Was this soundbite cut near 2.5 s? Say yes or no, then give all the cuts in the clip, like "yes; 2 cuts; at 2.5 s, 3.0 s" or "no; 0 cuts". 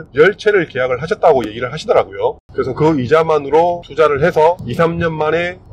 yes; 1 cut; at 2.5 s